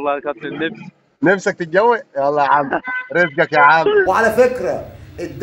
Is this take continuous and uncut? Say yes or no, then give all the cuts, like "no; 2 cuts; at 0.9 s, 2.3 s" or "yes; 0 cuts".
no; 1 cut; at 4.1 s